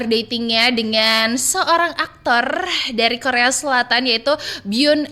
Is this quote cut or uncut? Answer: uncut